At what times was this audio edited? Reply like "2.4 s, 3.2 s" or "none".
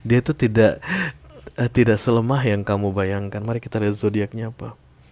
none